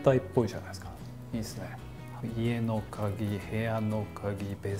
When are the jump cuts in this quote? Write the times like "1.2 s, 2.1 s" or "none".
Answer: 2.1 s

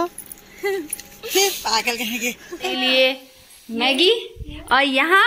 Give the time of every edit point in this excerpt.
2.7 s

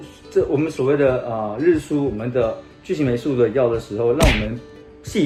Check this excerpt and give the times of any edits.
none

